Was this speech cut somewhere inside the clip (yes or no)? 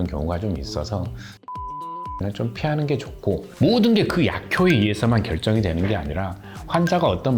yes